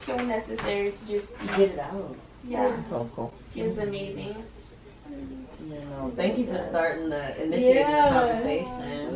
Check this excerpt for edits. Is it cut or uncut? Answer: uncut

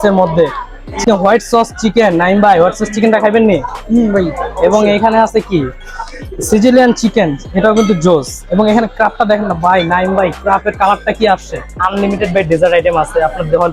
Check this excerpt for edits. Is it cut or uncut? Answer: cut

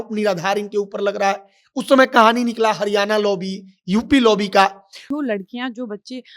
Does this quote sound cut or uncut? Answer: cut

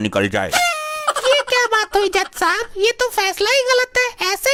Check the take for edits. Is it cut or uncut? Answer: uncut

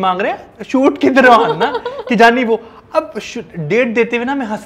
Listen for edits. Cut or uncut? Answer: uncut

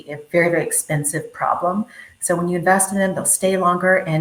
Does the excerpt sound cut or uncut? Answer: uncut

